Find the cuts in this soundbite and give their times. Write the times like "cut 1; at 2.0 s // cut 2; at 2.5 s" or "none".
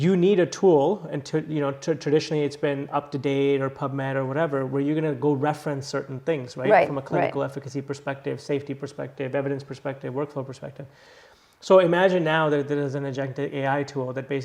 none